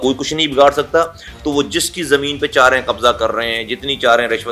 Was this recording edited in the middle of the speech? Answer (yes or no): no